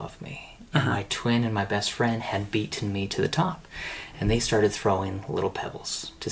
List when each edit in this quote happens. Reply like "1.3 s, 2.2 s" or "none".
none